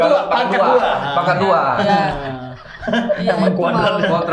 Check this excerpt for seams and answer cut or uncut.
uncut